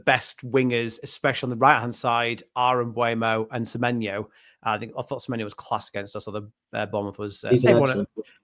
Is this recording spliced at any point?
no; 0 cuts

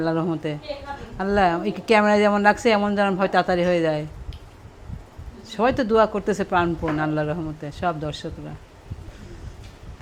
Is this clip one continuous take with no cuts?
yes; 0 cuts

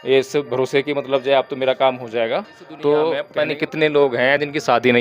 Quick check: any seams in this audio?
yes; 1 cut; at 3.3 s

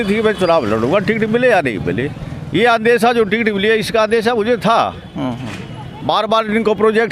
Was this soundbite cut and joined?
no; 0 cuts

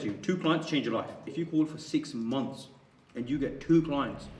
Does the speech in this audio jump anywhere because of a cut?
yes; 1 cut; at 1.3 s

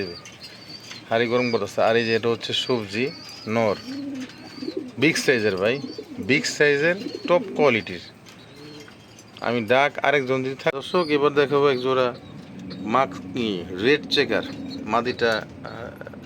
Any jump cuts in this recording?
yes; 1 cut; at 10.8 s

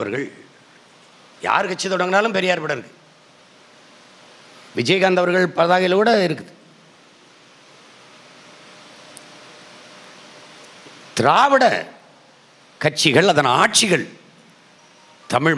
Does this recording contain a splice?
no; 0 cuts

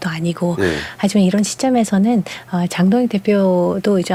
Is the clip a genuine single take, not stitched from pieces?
yes; 0 cuts

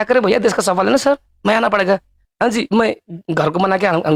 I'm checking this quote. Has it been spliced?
no; 0 cuts

